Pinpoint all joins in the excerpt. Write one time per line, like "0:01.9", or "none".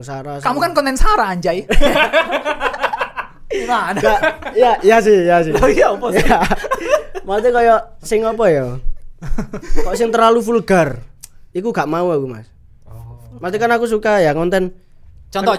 none